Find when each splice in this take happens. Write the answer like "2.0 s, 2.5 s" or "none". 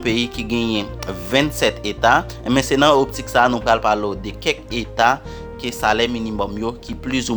2.3 s